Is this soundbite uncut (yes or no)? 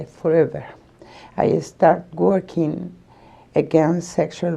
no